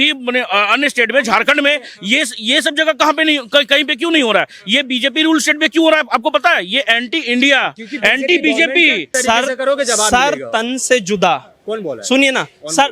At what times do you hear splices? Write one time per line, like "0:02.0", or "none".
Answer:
0:09.1